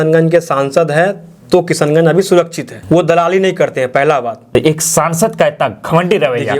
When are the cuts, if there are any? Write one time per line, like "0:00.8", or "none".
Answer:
0:04.5